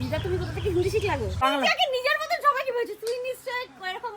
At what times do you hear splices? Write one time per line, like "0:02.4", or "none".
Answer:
0:01.4